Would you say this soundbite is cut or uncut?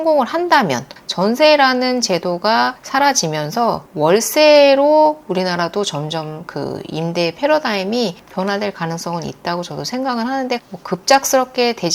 cut